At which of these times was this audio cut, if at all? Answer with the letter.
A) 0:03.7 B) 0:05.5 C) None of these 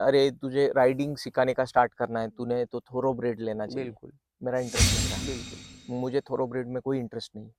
C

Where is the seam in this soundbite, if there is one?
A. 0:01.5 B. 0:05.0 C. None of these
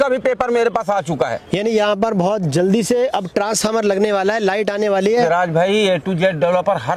C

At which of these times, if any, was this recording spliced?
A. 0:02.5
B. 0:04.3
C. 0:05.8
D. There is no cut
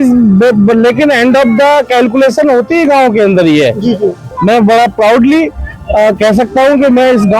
B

